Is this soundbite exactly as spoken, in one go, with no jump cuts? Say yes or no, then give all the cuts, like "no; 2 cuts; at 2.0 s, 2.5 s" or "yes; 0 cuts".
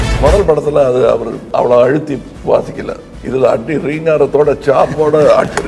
no; 3 cuts; at 1.4 s, 2.3 s, 3.1 s